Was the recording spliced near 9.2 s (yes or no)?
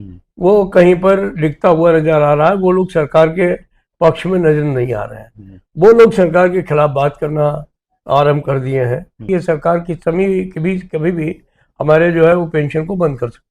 yes